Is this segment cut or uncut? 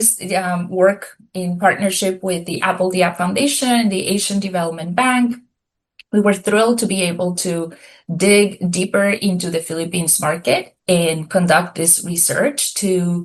uncut